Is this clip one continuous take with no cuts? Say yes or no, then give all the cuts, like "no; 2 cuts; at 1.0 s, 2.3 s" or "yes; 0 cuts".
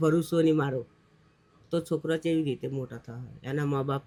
yes; 0 cuts